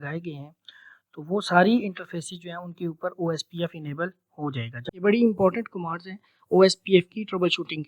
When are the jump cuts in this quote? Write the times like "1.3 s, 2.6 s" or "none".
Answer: 4.8 s